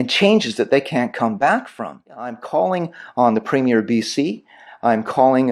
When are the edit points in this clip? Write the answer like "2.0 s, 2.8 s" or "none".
2.4 s